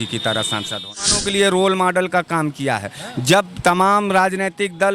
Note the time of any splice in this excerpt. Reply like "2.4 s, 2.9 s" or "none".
1.2 s